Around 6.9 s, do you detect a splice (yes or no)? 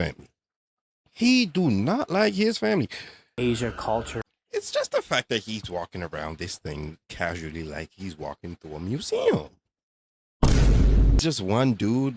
no